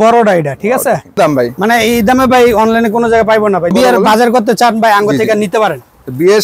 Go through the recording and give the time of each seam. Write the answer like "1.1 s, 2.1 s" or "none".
1.2 s, 3.7 s